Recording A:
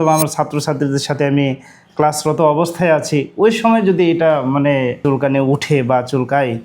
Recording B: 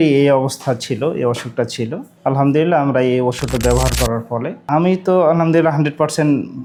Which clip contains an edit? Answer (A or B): A